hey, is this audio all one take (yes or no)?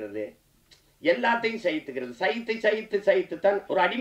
yes